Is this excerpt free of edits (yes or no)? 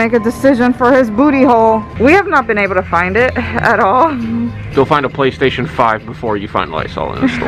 no